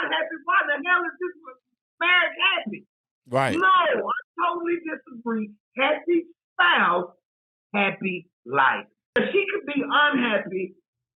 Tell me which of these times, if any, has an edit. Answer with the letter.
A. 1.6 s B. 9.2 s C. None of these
B